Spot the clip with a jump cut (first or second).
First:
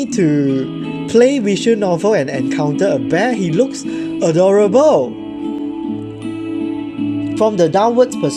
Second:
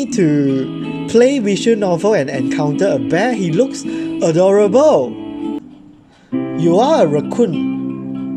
second